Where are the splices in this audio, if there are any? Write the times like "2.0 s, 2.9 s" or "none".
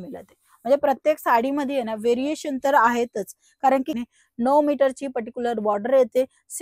4.0 s